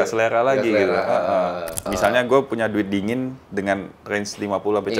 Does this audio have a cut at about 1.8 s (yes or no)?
yes